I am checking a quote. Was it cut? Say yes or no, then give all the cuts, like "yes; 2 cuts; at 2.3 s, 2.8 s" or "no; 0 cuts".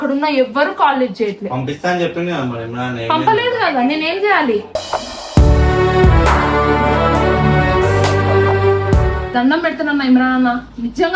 yes; 1 cut; at 9.3 s